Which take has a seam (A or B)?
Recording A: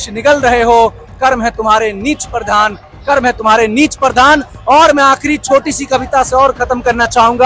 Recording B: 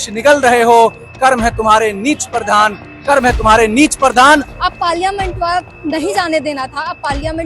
B